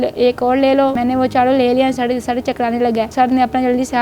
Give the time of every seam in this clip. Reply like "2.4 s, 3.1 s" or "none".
1.0 s, 3.1 s